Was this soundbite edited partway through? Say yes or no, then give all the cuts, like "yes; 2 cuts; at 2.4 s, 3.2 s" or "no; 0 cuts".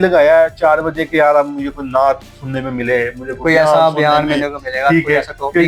no; 0 cuts